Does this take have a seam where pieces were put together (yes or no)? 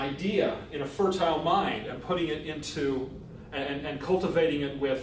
no